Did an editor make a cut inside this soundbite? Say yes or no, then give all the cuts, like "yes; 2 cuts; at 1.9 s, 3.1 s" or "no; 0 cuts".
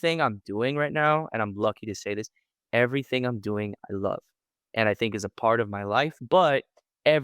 yes; 1 cut; at 6.2 s